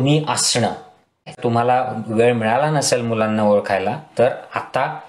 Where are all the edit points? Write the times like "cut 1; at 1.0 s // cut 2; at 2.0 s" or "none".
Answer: cut 1; at 1.4 s